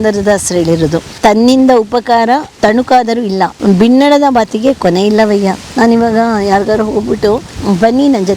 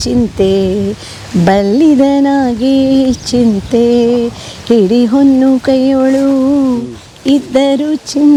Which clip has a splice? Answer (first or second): first